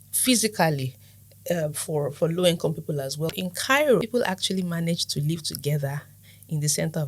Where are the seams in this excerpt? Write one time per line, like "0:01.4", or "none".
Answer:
0:03.3
0:04.0